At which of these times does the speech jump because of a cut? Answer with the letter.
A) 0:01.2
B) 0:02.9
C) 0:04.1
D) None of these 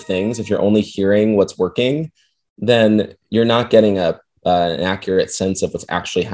D